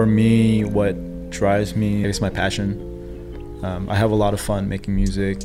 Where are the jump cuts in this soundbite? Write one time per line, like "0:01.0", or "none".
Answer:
0:02.0